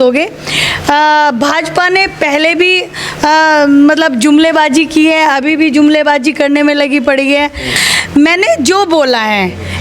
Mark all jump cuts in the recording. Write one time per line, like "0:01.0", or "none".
0:07.7